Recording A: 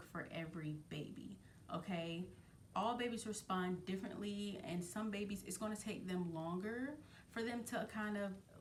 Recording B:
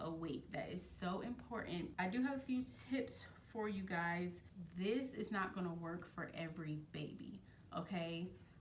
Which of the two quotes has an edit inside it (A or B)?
B